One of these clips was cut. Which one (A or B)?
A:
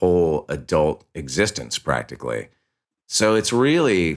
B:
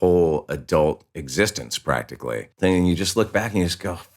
B